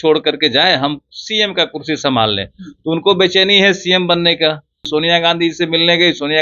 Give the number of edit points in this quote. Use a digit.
1